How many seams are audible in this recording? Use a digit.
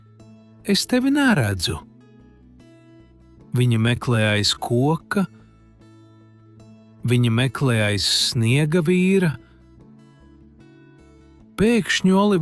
0